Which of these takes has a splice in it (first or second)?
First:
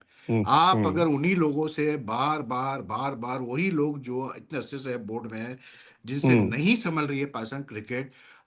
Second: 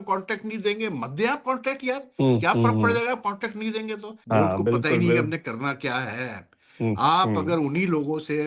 second